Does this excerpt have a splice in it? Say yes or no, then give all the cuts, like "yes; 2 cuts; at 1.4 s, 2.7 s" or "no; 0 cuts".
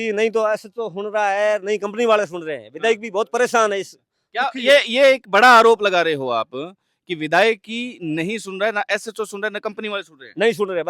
no; 0 cuts